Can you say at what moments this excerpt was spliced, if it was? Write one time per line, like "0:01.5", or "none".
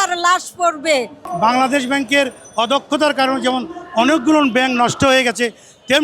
0:01.2

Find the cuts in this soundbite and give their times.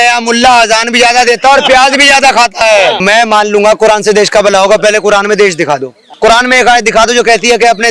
0:03.0
0:06.0

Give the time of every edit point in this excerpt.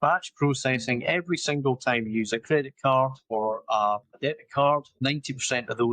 0:03.2
0:04.2
0:04.9

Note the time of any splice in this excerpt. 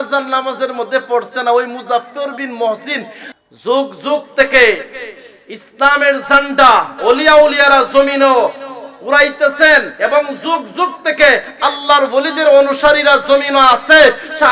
0:03.2

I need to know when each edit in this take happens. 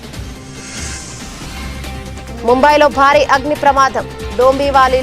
0:02.4

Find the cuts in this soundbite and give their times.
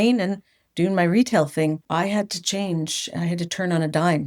0:01.8

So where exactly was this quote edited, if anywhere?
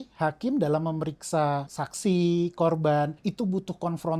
0:01.8
0:03.2

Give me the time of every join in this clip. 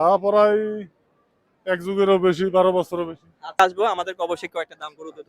0:03.6

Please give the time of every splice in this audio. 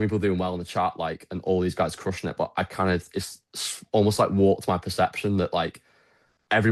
none

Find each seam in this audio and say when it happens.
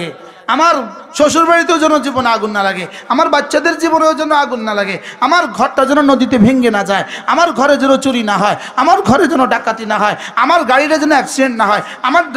none

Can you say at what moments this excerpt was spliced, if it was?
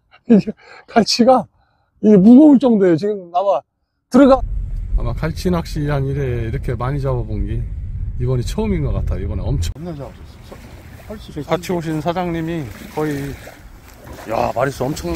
0:04.3
0:09.7

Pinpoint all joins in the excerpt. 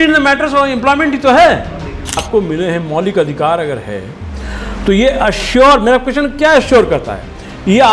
0:02.2

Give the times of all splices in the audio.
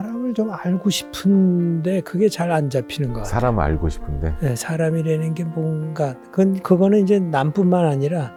none

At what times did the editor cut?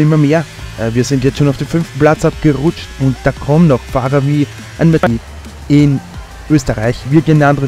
0:05.0

